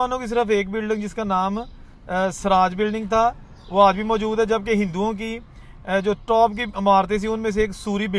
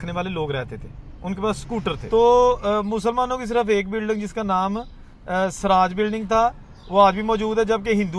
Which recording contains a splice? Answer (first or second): second